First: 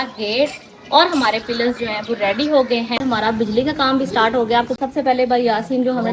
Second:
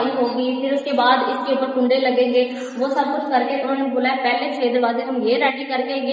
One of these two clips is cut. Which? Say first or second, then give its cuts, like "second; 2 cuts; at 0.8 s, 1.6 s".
first; 2 cuts; at 3.0 s, 4.8 s